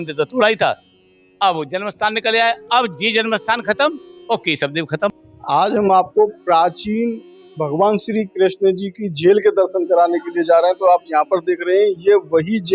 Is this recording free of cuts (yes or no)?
no